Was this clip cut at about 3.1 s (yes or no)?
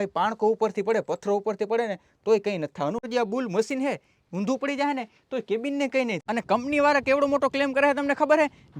yes